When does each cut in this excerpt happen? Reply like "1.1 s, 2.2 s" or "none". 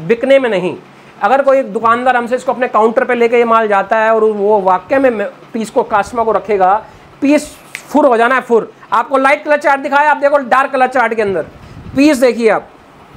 8.8 s